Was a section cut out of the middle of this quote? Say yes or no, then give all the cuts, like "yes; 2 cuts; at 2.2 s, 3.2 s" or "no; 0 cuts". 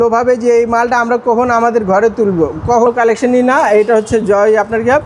yes; 1 cut; at 2.8 s